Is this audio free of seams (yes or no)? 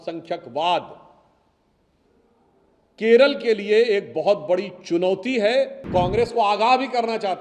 no